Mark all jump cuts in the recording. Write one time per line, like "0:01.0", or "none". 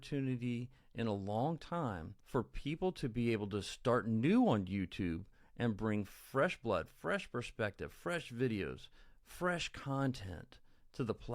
0:02.1